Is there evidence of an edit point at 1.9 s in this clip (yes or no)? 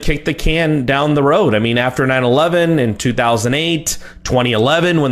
yes